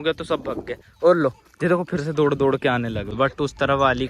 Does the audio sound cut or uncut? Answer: cut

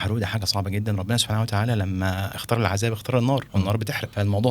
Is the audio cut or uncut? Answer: cut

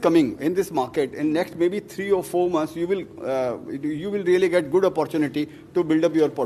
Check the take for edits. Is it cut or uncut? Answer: uncut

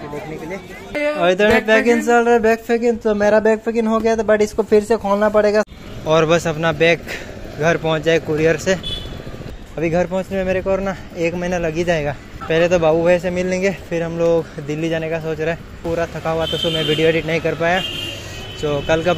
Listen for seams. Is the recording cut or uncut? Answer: cut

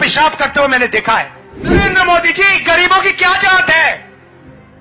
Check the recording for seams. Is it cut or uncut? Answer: cut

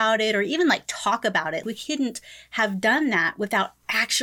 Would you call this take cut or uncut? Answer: cut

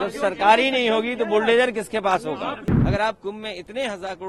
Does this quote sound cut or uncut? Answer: cut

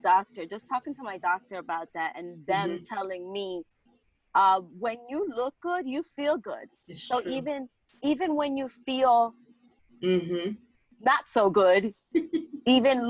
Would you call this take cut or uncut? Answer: uncut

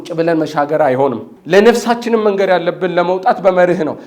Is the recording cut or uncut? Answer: cut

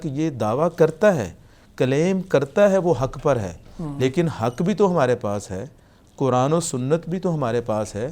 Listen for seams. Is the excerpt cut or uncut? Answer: uncut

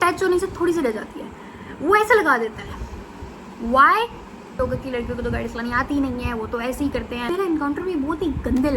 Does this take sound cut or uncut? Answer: cut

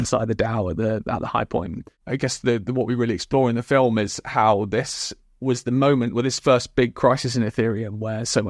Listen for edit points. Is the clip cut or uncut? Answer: cut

